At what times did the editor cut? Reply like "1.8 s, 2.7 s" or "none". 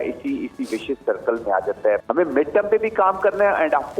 2.0 s